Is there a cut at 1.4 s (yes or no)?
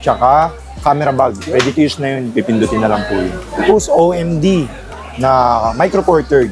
no